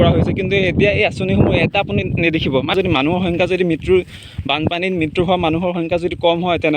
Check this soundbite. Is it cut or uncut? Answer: cut